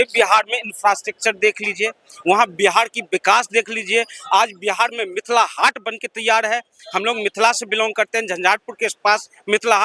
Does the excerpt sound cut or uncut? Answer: uncut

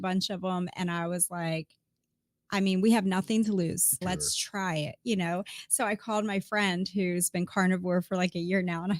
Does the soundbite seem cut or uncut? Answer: cut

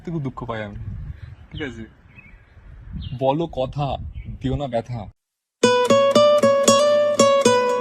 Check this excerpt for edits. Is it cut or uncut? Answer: uncut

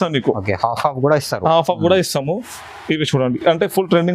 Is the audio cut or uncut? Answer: uncut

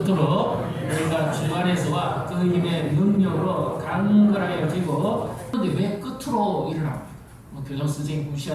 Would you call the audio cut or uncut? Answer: uncut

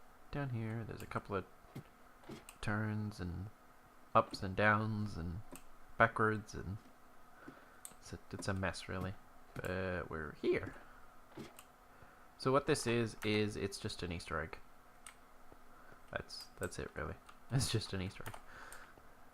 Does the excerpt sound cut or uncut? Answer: cut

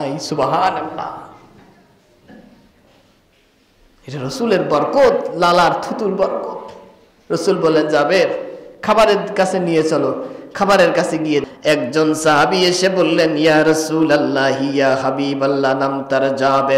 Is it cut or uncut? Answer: cut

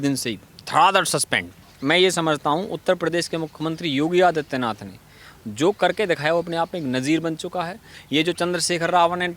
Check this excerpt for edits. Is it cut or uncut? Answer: cut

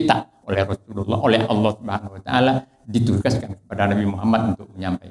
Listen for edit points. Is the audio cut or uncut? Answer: uncut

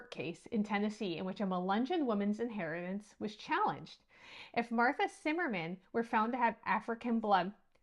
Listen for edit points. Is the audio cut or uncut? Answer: uncut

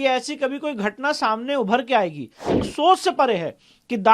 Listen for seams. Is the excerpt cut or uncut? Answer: cut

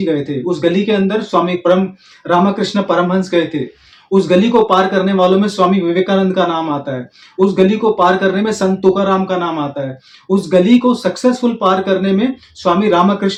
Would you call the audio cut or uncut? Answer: uncut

